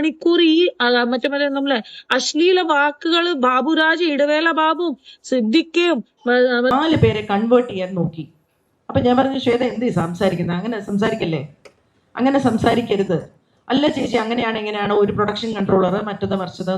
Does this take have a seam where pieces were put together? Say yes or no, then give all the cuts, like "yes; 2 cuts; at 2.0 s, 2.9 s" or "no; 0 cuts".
yes; 1 cut; at 6.7 s